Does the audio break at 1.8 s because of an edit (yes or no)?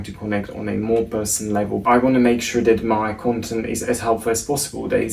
yes